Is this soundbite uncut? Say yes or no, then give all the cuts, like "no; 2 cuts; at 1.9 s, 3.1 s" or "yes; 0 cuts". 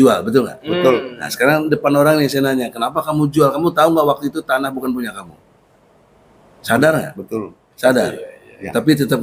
yes; 0 cuts